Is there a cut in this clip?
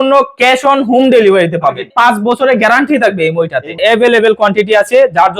yes; 2 cuts; at 1.9 s, 3.7 s

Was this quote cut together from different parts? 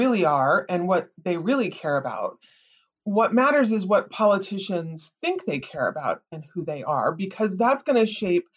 no; 0 cuts

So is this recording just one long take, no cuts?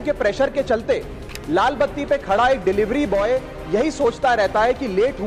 yes; 0 cuts

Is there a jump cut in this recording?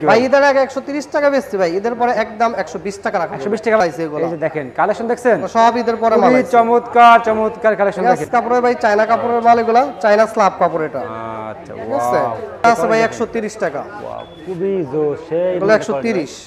yes; 3 cuts; at 3.8 s, 8.2 s, 12.6 s

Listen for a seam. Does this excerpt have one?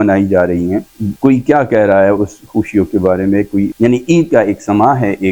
yes; 2 cuts; at 1.0 s, 3.7 s

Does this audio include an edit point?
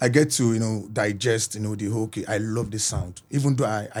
no; 0 cuts

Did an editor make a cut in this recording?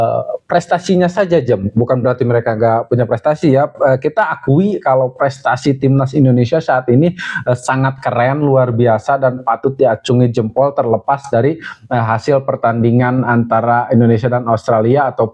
no; 0 cuts

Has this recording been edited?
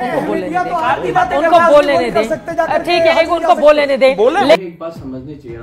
yes; 1 cut; at 4.6 s

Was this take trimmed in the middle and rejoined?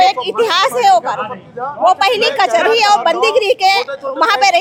no; 0 cuts

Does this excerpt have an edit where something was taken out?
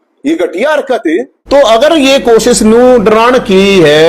yes; 1 cut; at 1.3 s

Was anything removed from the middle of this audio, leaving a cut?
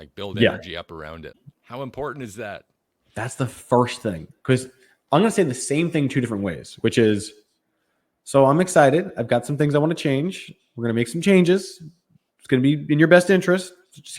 yes; 1 cut; at 1.4 s

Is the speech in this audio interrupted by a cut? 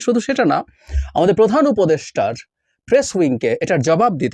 no; 0 cuts

